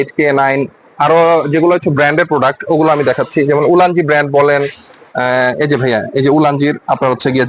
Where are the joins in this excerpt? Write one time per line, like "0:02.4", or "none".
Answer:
none